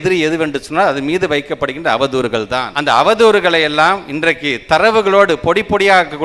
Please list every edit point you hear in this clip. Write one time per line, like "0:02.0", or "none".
0:02.7